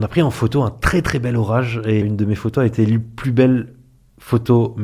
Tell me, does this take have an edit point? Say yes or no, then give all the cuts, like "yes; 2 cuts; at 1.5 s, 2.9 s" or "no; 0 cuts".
yes; 1 cut; at 2.0 s